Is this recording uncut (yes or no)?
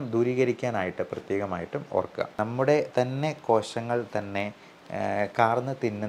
no